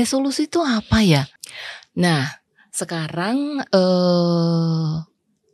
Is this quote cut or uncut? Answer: uncut